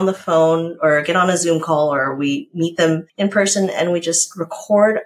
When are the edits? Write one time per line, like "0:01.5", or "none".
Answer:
0:03.1